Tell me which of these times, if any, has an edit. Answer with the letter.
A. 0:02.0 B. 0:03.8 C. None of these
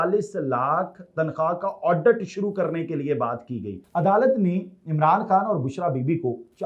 B